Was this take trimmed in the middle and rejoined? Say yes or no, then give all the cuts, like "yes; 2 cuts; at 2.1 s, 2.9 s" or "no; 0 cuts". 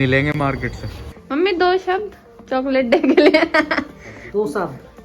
yes; 1 cut; at 1.2 s